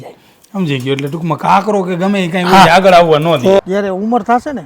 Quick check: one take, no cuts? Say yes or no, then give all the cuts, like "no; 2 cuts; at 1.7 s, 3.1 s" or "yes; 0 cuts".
no; 1 cut; at 3.6 s